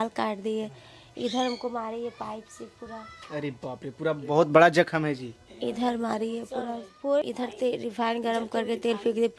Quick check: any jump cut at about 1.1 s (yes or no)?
no